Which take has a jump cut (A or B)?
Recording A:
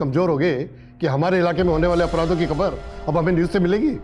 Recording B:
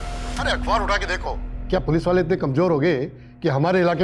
B